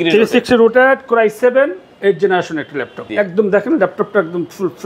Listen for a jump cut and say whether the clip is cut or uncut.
cut